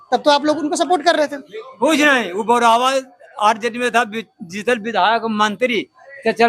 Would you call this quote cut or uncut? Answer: uncut